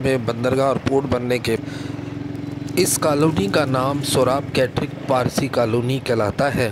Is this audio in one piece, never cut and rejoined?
no; 1 cut; at 1.6 s

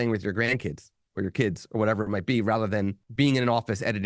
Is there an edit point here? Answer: yes; 1 cut; at 3.0 s

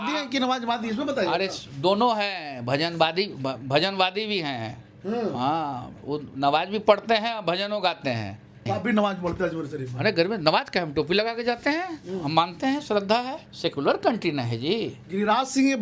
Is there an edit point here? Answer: yes; 2 cuts; at 8.7 s, 13.4 s

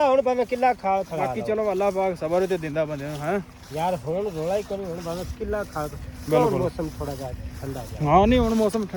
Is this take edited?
no; 0 cuts

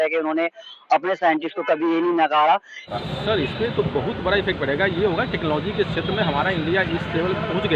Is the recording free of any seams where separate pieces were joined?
no; 1 cut; at 2.9 s

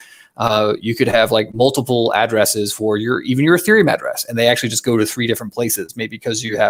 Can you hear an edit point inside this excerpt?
no; 0 cuts

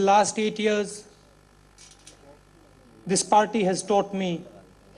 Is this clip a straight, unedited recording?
yes; 0 cuts

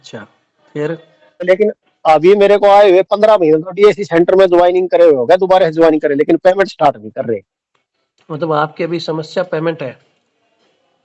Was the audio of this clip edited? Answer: yes; 1 cut; at 1.5 s

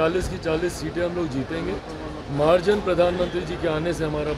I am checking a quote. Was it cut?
no; 0 cuts

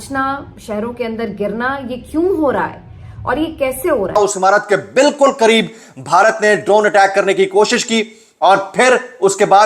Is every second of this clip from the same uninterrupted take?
no; 1 cut; at 4.2 s

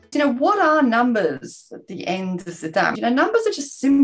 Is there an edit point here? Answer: yes; 1 cut; at 2.9 s

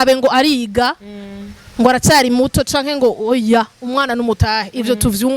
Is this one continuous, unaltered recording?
yes; 0 cuts

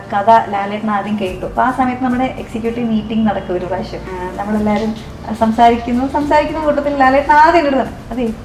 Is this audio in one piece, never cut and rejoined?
no; 1 cut; at 4.0 s

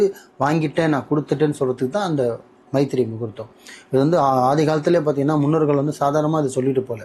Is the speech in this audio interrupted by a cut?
no; 0 cuts

